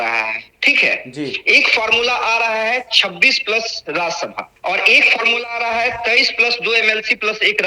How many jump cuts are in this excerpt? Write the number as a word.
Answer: one